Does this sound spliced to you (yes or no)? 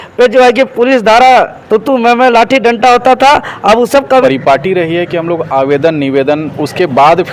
yes